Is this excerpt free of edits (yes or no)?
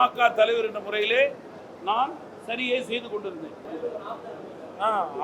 no